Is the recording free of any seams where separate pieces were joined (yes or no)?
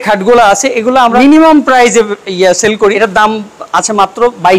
no